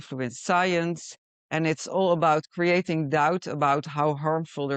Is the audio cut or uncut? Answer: uncut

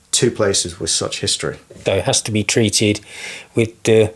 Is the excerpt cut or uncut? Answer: cut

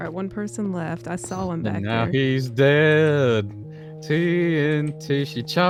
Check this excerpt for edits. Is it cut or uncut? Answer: uncut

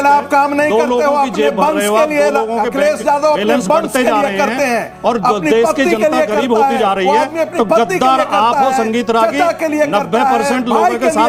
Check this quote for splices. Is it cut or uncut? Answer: uncut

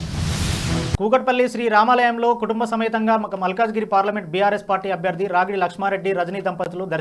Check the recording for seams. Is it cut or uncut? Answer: uncut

